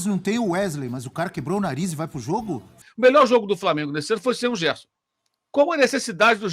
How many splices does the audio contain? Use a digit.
1